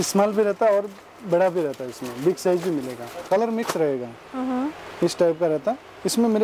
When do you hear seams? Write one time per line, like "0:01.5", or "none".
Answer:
0:03.2

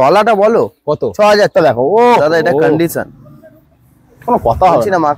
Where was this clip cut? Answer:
0:01.5

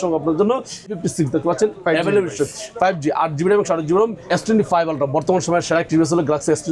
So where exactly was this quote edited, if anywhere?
0:01.0
0:04.3

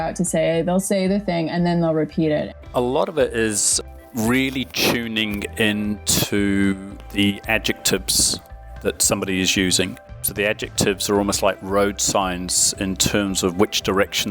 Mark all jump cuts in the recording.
0:02.6

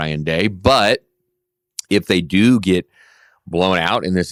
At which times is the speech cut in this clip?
none

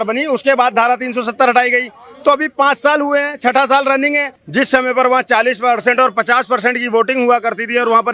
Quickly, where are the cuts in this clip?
0:04.4

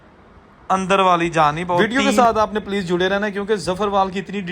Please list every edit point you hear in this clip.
0:01.8

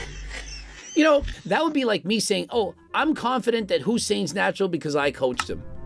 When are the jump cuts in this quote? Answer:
0:01.4

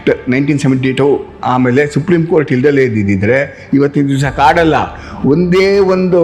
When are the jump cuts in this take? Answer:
none

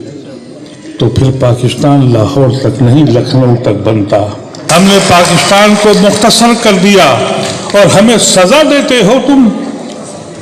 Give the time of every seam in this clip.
0:04.5

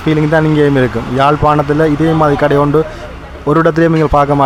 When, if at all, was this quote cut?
none

